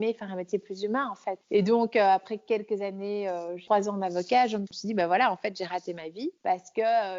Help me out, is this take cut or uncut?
cut